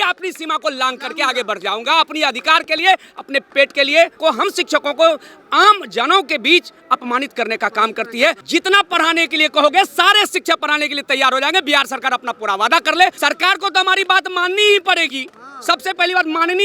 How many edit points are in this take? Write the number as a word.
three